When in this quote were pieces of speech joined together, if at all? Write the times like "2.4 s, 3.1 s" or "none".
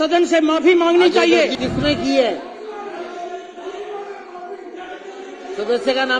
1.5 s